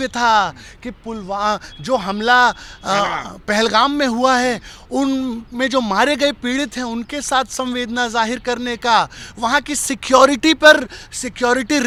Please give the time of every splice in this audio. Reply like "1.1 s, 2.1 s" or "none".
none